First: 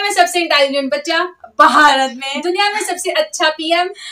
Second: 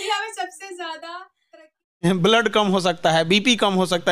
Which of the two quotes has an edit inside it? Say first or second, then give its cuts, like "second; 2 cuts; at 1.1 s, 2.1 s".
second; 1 cut; at 2.0 s